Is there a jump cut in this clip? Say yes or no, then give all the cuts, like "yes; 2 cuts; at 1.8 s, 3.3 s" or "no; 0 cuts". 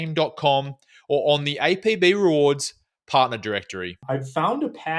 yes; 1 cut; at 3.9 s